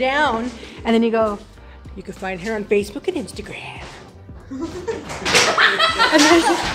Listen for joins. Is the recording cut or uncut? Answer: uncut